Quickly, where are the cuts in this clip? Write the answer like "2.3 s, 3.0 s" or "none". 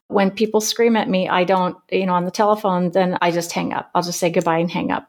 3.3 s